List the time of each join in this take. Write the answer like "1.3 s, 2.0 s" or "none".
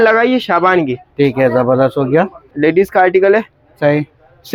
none